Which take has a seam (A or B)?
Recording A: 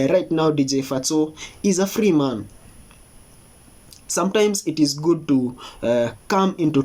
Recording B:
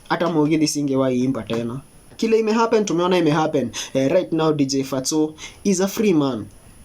B